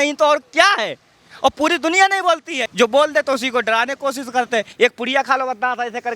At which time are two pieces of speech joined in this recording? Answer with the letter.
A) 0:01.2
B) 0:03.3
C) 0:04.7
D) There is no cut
C